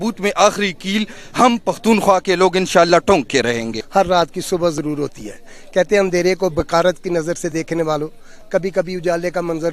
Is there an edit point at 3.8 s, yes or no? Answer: yes